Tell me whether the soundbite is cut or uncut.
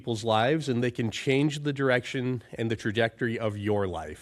uncut